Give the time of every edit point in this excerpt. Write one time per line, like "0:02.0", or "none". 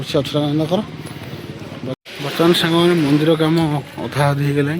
0:02.0